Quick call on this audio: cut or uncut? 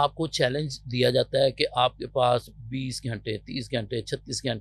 uncut